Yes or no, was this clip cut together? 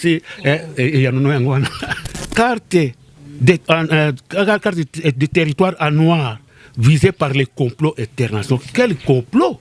yes